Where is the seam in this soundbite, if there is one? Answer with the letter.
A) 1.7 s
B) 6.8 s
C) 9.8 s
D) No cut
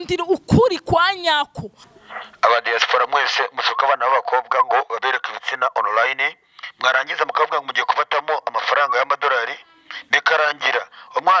A